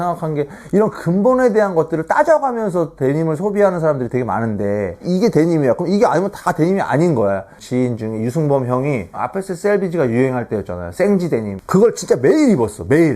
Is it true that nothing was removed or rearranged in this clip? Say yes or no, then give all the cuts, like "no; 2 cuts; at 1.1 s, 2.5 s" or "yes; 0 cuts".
no; 1 cut; at 7.6 s